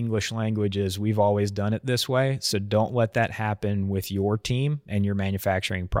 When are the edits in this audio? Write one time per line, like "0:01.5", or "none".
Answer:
0:04.9